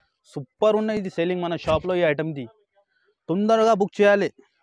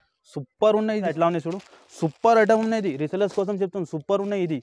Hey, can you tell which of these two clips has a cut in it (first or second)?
second